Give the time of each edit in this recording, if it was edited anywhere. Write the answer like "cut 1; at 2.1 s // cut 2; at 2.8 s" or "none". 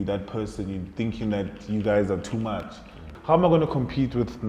cut 1; at 3.1 s